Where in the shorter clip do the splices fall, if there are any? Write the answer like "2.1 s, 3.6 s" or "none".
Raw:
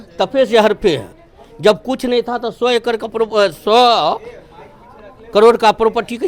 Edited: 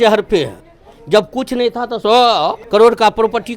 2.0 s, 2.6 s